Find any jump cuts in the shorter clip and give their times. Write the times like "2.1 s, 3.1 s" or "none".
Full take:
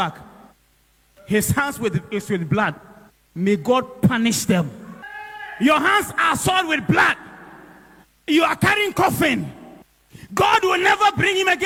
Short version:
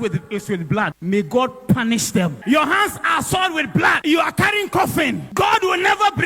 1.0 s, 2.4 s, 4.0 s, 5.2 s